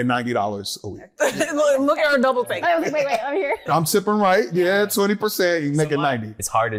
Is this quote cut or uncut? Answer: uncut